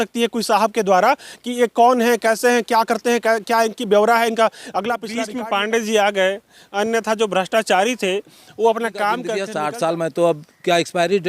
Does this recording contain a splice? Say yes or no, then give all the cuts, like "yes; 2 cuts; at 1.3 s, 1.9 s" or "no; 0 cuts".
yes; 2 cuts; at 5.3 s, 9.4 s